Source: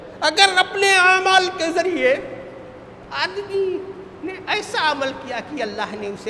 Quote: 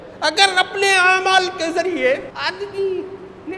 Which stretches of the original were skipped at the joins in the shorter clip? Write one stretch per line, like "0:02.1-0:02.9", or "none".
0:02.3-0:03.1